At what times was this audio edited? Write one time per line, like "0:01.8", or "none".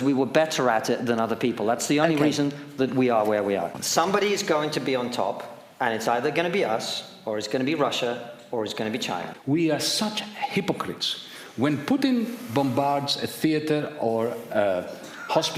0:03.8
0:09.3